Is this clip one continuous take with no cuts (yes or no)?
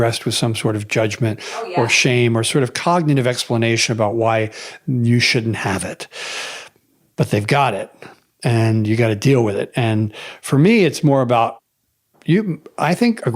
no